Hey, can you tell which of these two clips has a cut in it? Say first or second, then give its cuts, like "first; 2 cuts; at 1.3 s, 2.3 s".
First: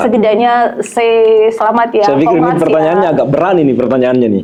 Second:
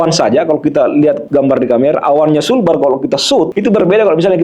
second; 2 cuts; at 1.2 s, 3.5 s